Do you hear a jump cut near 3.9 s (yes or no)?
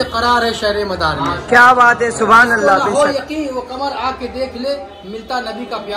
no